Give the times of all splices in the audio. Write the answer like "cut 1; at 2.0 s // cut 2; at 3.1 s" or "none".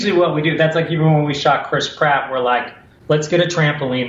cut 1; at 2.9 s